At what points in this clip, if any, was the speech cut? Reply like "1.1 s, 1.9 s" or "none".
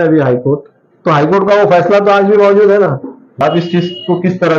3.4 s